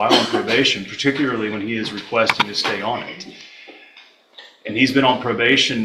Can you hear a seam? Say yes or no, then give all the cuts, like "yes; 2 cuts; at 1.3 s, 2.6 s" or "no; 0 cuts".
no; 0 cuts